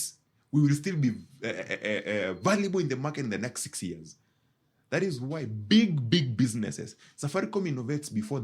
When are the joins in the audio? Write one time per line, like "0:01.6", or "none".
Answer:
none